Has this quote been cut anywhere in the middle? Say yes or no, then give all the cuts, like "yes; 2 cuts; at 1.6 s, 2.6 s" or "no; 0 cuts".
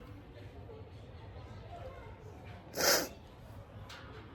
no; 0 cuts